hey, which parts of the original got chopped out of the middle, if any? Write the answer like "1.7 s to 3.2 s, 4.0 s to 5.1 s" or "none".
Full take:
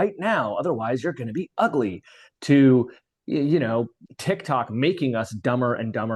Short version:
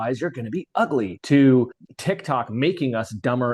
2.0 s to 2.3 s, 3.0 s to 4.1 s